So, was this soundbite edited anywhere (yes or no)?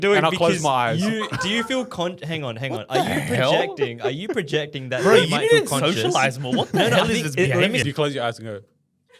yes